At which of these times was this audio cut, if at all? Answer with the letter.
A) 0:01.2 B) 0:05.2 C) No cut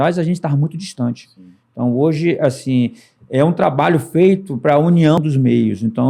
B